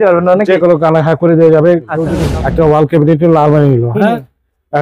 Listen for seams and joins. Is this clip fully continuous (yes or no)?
no